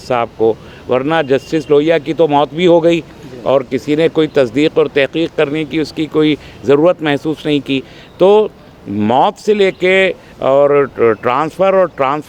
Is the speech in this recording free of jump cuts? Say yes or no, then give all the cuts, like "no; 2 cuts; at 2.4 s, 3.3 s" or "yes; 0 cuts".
yes; 0 cuts